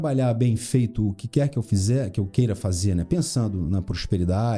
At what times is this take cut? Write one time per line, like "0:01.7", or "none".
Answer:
none